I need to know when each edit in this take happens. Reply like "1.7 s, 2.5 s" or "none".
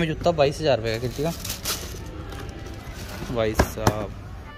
none

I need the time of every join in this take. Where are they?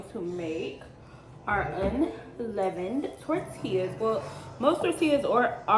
none

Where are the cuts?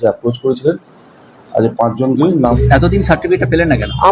2.5 s

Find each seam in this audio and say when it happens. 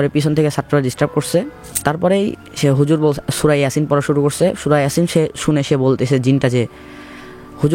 1.6 s

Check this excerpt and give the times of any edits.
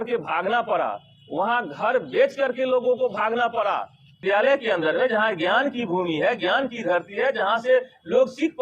4.2 s

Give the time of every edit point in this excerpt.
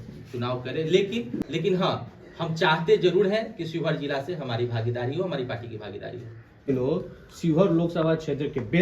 1.4 s, 6.7 s

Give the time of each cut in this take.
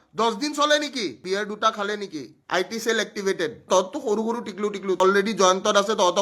1.2 s, 3.6 s, 5.0 s

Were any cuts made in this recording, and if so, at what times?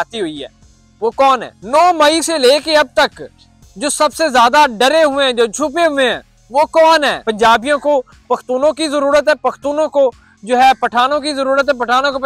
1.5 s, 7.2 s

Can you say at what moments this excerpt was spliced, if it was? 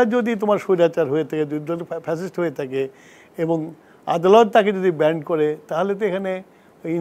none

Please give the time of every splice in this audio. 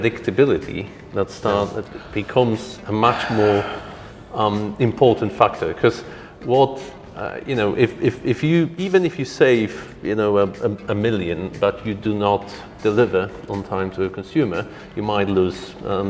none

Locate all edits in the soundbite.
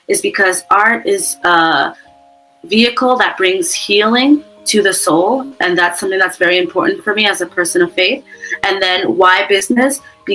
none

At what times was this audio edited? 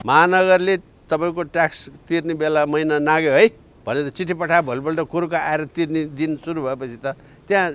none

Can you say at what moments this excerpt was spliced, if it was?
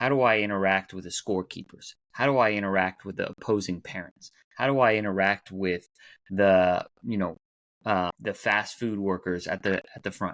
8.2 s

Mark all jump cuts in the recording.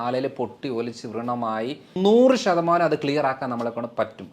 2.0 s

